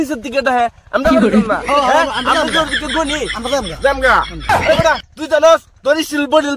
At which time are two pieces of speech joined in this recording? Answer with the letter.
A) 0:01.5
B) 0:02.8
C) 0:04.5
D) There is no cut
C